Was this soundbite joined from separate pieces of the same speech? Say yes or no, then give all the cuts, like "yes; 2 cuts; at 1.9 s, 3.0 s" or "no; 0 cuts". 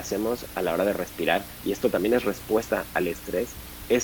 no; 0 cuts